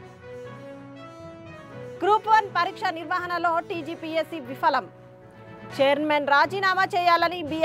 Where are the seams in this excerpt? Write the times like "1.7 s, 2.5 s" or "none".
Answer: 1.3 s